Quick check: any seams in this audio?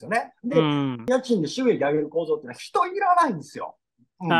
yes; 1 cut; at 1.0 s

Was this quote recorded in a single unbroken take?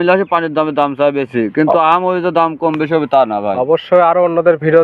yes; 0 cuts

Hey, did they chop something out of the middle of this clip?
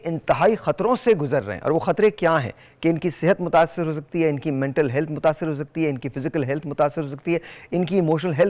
no; 0 cuts

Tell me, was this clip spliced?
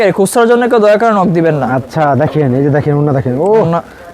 no; 0 cuts

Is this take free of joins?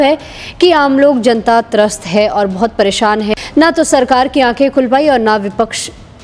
no; 1 cut; at 3.3 s

